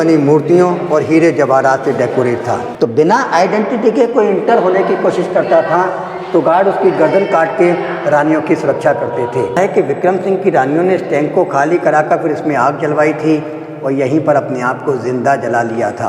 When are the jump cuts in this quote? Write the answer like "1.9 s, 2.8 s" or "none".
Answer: 2.6 s, 9.6 s